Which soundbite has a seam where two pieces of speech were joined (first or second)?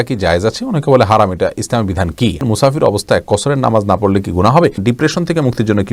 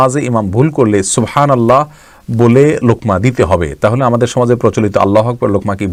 first